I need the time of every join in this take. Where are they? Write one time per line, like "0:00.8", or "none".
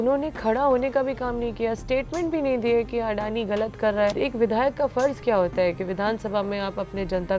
0:04.1